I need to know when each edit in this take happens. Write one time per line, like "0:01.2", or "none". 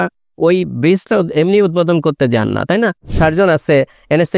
0:03.1